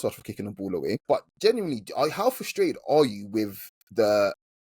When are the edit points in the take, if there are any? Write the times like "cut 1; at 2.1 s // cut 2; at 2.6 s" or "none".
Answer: cut 1; at 1.0 s